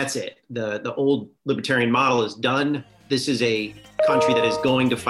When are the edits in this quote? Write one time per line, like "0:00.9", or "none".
0:01.3
0:02.9